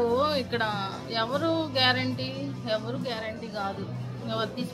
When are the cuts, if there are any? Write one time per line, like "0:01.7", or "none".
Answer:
none